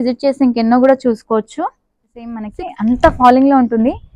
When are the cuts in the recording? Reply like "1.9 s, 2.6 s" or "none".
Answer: 2.4 s